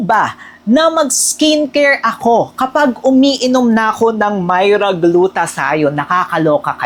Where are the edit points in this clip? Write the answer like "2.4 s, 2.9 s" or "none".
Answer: none